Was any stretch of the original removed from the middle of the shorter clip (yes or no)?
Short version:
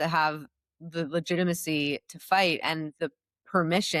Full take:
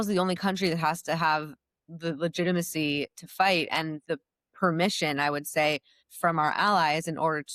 no